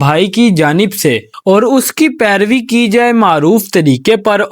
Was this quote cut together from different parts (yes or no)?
yes